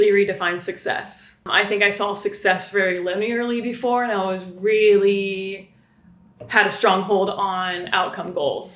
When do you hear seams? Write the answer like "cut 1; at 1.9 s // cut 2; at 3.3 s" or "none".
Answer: cut 1; at 1.5 s

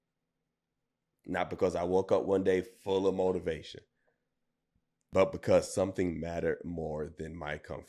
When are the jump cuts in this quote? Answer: cut 1; at 5.1 s

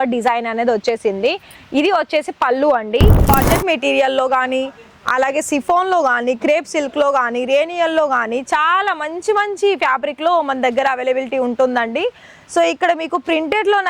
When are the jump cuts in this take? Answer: cut 1; at 3.3 s

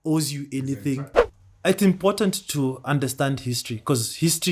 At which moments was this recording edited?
cut 1; at 1.0 s

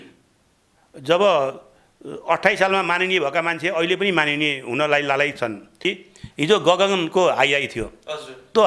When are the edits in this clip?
cut 1; at 5.8 s

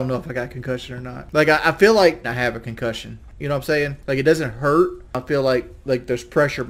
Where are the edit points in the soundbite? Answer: cut 1; at 1.2 s // cut 2; at 5.2 s

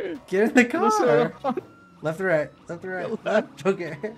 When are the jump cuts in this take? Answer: cut 1; at 1.8 s

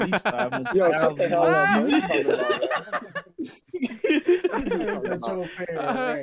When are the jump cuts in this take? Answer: none

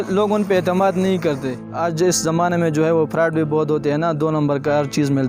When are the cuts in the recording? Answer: cut 1; at 1.9 s

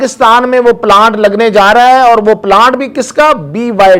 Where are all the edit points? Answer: none

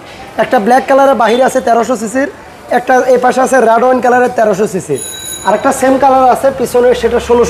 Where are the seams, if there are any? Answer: none

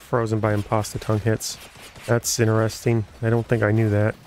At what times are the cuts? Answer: none

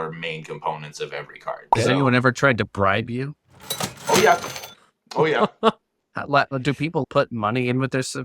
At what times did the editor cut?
cut 1; at 1.7 s // cut 2; at 7.0 s

